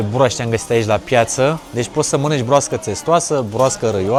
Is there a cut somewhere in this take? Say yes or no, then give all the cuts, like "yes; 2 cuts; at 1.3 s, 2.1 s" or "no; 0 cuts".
no; 0 cuts